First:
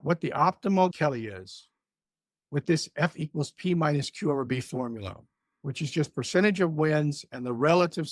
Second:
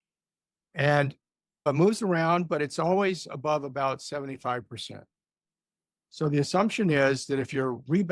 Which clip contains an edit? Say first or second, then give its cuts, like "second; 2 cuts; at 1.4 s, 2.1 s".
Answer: first; 1 cut; at 0.9 s